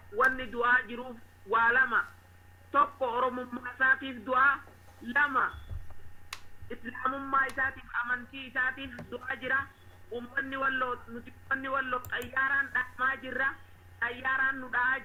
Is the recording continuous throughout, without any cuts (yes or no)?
yes